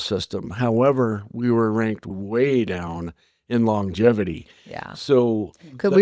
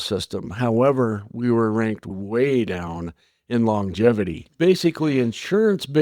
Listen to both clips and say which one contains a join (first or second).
second